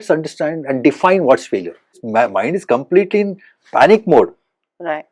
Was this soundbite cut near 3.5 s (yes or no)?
no